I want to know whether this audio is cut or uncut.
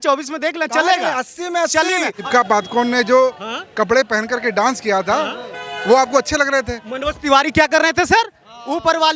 cut